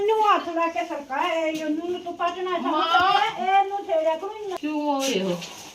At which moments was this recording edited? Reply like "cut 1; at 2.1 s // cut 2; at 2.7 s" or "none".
cut 1; at 4.5 s